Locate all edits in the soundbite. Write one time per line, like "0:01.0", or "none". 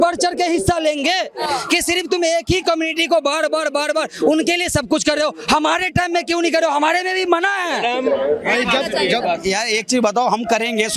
none